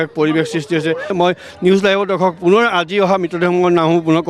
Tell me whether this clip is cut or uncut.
cut